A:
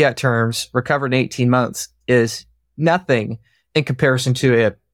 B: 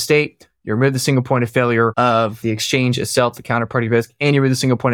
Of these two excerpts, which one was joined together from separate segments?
B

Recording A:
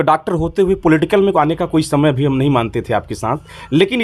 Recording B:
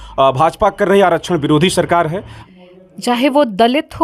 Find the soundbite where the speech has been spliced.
B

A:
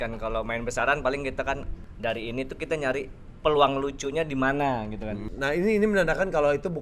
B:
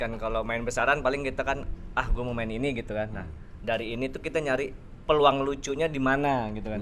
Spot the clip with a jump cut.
A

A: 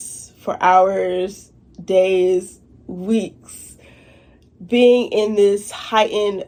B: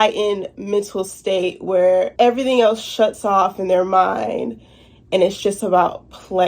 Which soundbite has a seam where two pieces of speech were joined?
B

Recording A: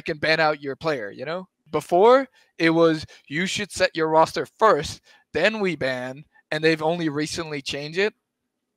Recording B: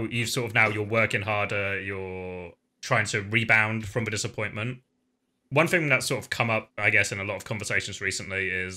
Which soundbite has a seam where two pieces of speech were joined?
A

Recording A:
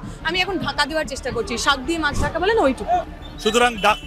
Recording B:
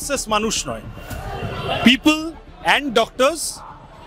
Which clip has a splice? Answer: A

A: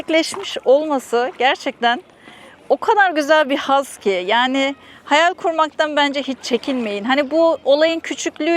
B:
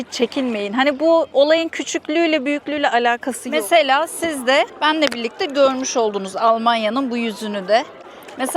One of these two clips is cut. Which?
B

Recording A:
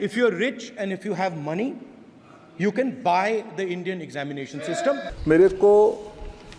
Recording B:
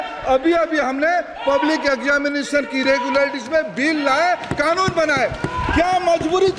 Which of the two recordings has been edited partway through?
A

